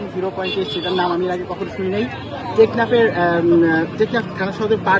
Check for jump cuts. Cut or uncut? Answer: uncut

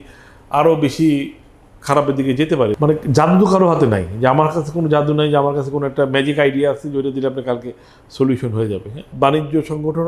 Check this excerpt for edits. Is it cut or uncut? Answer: cut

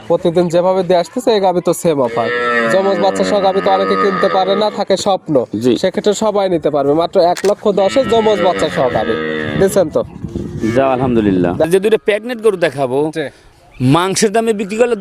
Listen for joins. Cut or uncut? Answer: cut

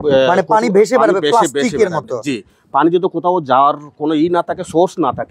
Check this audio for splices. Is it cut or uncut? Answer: uncut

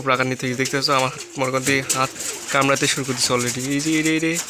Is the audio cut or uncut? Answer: uncut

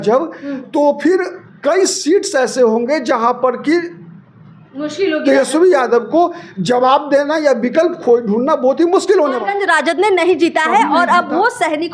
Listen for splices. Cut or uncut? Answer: cut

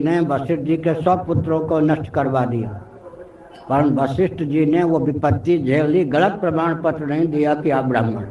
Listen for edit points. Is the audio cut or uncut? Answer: uncut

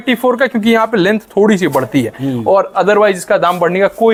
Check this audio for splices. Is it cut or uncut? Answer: uncut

